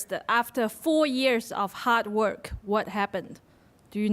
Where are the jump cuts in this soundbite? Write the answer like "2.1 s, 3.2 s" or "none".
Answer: 2.9 s